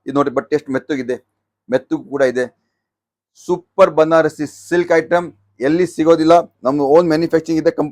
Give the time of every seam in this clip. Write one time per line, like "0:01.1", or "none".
none